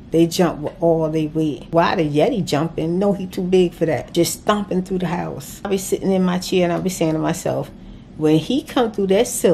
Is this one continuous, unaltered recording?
no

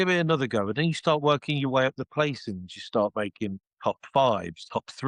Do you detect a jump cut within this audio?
no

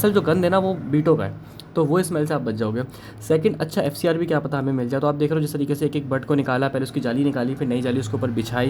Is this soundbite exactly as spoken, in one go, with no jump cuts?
yes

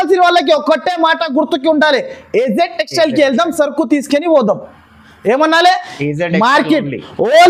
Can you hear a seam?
no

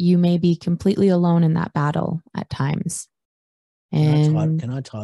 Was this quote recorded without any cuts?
yes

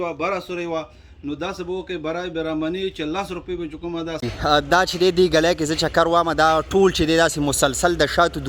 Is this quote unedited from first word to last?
no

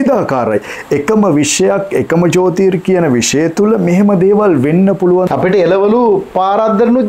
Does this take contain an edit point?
yes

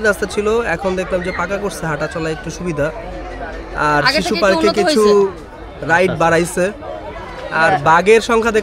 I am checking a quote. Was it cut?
no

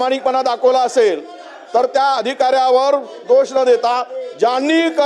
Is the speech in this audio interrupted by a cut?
no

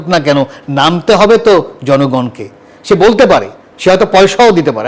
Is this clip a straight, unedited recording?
no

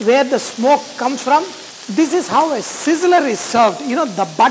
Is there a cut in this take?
no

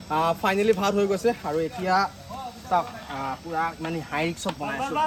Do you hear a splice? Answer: no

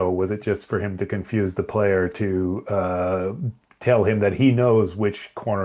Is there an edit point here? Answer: no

